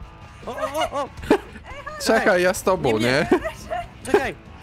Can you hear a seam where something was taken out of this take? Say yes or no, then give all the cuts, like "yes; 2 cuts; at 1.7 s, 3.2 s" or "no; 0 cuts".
no; 0 cuts